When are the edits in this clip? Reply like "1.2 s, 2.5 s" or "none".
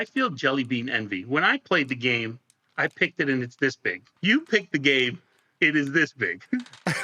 4.1 s

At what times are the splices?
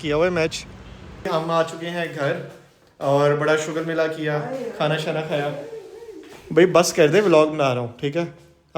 1.2 s

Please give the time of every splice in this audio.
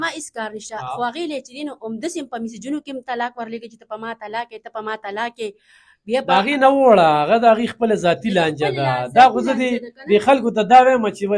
none

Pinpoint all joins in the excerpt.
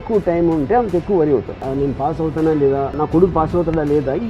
1.7 s, 3.0 s

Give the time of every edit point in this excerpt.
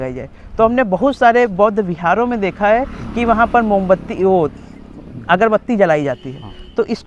none

